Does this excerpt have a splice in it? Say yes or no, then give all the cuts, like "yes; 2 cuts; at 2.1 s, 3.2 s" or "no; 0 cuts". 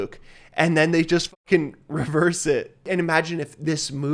yes; 1 cut; at 2.9 s